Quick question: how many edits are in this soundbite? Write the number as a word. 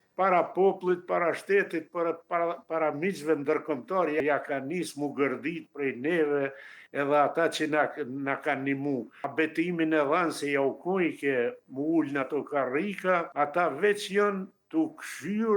three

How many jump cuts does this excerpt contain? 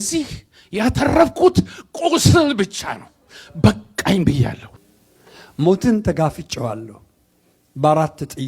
one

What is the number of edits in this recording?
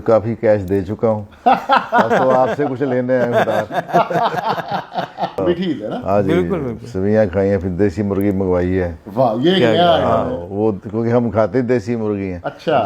one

